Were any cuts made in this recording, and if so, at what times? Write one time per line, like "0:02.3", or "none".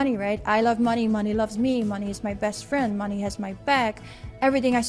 none